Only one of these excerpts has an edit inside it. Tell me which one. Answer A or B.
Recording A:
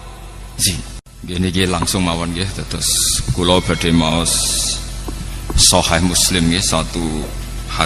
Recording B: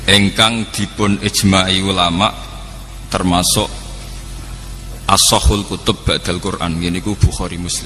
A